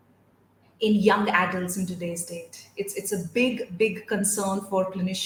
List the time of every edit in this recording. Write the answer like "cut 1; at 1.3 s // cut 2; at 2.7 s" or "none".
none